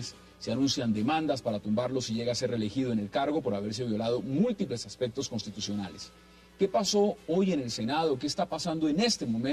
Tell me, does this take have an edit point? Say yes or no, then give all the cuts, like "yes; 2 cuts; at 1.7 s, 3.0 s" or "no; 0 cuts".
yes; 1 cut; at 7.7 s